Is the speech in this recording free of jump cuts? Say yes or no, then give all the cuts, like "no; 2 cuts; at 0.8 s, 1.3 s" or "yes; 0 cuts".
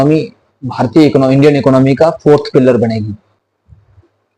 yes; 0 cuts